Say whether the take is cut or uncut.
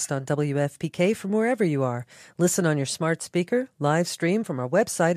uncut